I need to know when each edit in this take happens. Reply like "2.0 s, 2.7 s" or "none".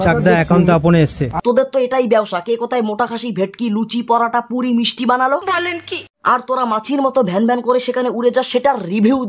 none